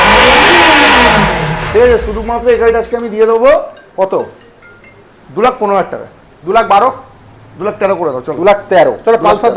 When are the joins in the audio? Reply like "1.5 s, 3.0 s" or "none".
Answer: none